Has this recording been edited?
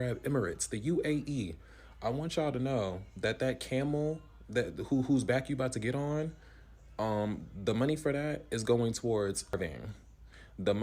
yes; 1 cut; at 9.6 s

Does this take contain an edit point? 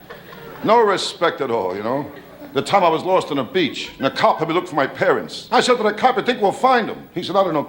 no; 0 cuts

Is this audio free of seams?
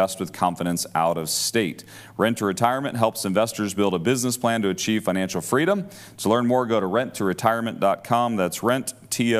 yes; 0 cuts

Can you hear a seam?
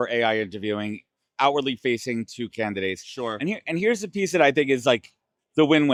no; 0 cuts

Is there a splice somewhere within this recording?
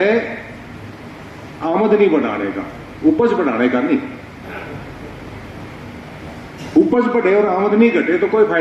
no; 0 cuts

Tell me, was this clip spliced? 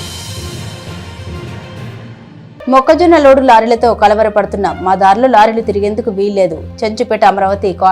yes; 1 cut; at 1.9 s

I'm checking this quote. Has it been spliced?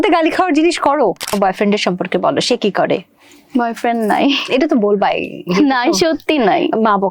yes; 1 cut; at 1.3 s

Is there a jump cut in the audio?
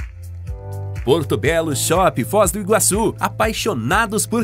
yes; 1 cut; at 1.0 s

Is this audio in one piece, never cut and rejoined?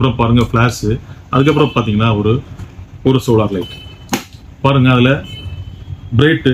yes; 0 cuts

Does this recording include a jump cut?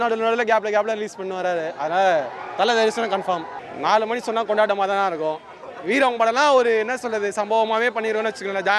yes; 1 cut; at 3.6 s

